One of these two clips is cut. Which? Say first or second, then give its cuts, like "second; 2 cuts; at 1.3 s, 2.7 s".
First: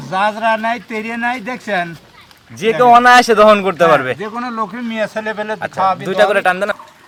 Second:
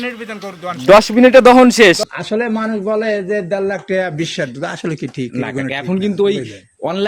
second; 1 cut; at 2.1 s